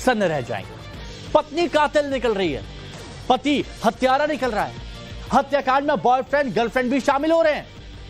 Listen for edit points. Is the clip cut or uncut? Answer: cut